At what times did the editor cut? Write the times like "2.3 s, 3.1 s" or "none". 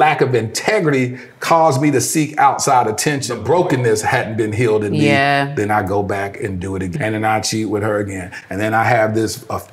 3.3 s, 6.9 s

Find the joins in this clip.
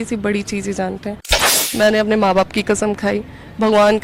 1.3 s

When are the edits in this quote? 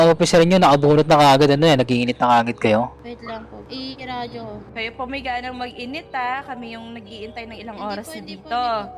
none

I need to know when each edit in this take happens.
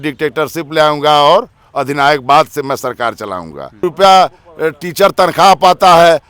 3.8 s

